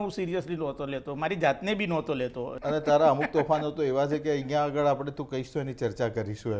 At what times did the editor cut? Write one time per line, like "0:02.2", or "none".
0:02.6